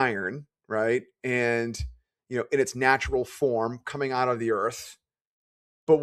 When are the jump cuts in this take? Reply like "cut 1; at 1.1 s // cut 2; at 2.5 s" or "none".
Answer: none